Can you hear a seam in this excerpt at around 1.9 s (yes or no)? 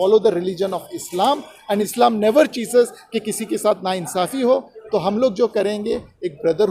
yes